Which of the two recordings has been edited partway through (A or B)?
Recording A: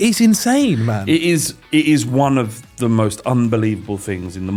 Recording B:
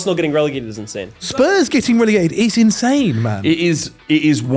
B